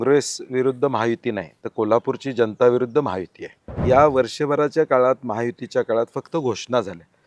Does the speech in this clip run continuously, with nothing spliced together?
no; 1 cut; at 3.8 s

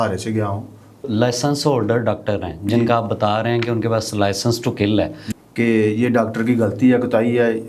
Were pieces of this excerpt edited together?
yes; 2 cuts; at 1.0 s, 5.2 s

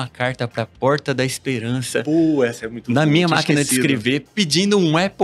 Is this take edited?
no; 0 cuts

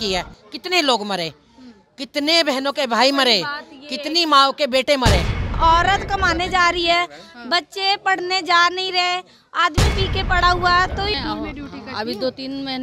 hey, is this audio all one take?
no; 2 cuts; at 5.5 s, 11.2 s

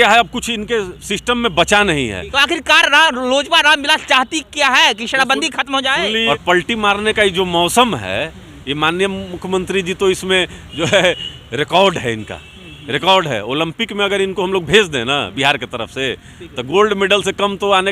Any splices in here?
yes; 2 cuts; at 2.3 s, 6.2 s

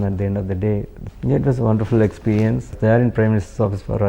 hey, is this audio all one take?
no; 2 cuts; at 1.0 s, 2.7 s

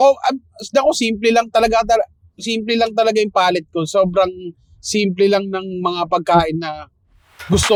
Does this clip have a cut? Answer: no; 0 cuts

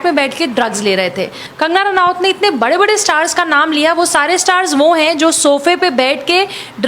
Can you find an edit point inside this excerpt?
yes; 1 cut; at 1.4 s

